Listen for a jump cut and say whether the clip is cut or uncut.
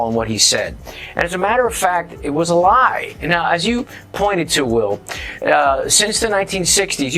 cut